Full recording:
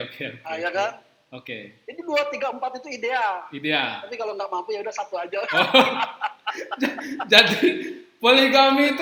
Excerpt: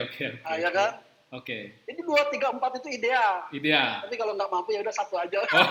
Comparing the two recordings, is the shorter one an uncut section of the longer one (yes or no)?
yes